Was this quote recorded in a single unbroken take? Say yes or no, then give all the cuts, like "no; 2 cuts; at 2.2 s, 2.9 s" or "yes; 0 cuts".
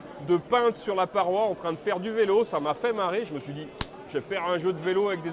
yes; 0 cuts